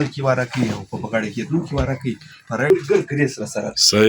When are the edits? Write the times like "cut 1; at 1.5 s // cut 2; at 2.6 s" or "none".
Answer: cut 1; at 2.7 s